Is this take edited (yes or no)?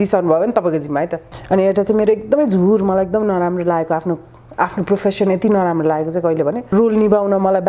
yes